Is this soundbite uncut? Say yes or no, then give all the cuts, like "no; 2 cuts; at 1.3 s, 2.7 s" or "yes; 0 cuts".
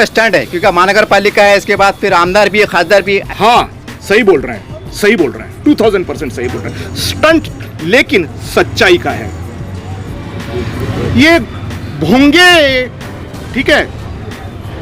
no; 1 cut; at 3.2 s